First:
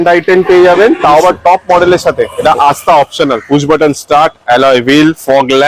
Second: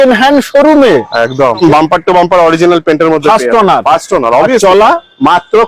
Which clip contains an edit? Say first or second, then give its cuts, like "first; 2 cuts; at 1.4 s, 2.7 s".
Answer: second; 1 cut; at 1.6 s